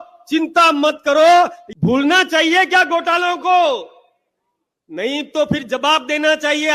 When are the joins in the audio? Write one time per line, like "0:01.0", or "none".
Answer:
0:01.6

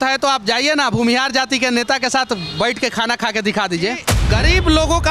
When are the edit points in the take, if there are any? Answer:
0:04.1

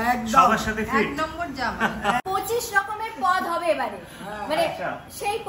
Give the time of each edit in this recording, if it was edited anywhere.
0:02.2

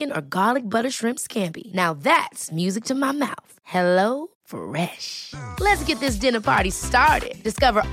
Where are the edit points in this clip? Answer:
none

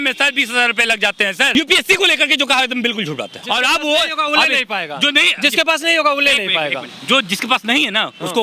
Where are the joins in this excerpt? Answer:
0:01.6
0:03.4

